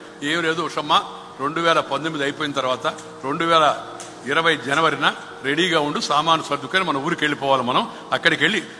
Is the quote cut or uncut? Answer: uncut